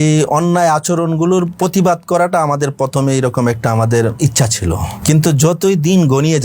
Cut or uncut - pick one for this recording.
cut